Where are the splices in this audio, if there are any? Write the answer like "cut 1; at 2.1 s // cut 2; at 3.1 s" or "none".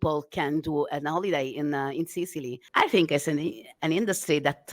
cut 1; at 2.6 s